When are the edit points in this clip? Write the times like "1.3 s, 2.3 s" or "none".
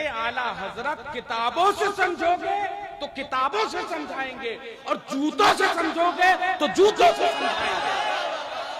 none